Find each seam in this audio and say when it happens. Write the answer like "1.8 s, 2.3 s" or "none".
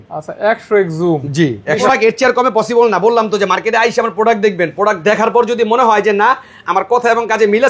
1.8 s